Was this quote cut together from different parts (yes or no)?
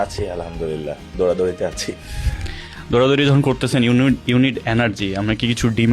no